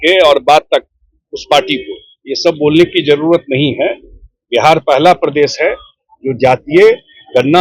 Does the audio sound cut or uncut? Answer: uncut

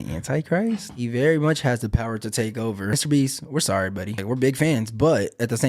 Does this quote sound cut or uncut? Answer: cut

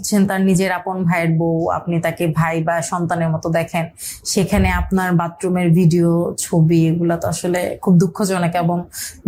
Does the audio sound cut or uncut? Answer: uncut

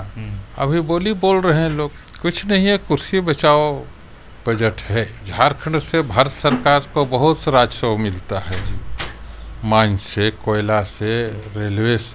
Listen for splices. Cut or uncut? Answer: cut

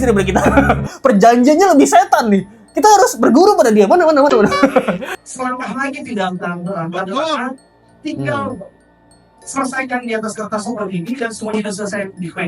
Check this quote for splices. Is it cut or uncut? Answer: cut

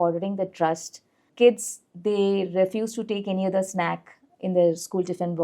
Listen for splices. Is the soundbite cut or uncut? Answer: cut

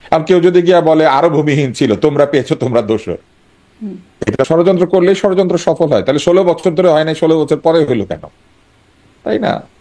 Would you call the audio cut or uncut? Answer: cut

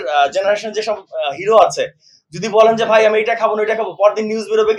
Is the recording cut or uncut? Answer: uncut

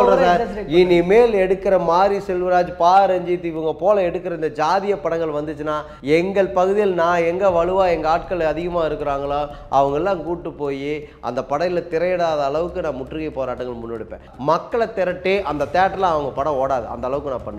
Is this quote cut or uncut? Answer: cut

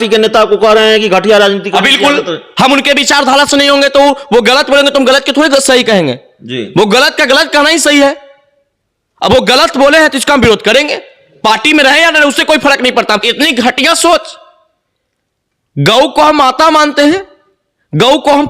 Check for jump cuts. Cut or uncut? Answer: cut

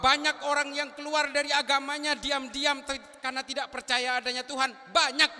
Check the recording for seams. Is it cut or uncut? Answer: uncut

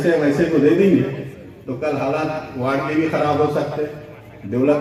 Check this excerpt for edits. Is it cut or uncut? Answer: uncut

